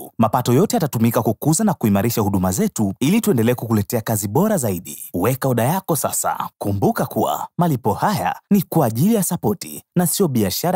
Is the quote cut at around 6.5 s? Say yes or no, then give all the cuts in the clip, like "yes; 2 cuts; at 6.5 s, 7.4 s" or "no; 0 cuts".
yes; 1 cut; at 6.5 s